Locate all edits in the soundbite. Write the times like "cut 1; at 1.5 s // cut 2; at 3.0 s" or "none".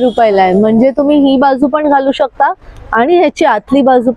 none